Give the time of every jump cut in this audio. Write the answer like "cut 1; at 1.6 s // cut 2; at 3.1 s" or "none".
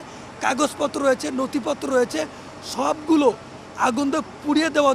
none